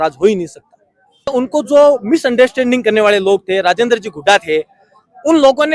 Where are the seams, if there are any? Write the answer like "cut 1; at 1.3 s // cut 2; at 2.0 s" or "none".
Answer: cut 1; at 1.3 s

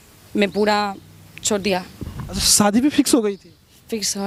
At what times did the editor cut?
none

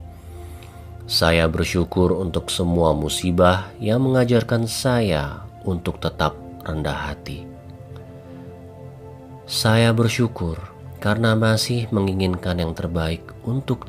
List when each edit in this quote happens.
cut 1; at 1.2 s

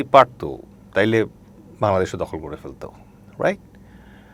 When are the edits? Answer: none

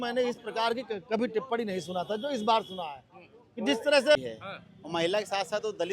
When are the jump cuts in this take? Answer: cut 1; at 4.2 s

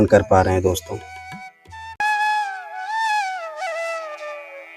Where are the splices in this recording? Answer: none

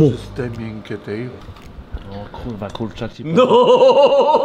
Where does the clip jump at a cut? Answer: cut 1; at 1.5 s

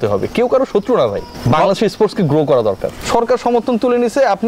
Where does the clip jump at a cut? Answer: cut 1; at 1.3 s // cut 2; at 2.9 s

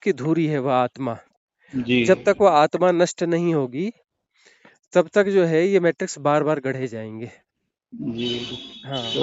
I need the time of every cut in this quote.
none

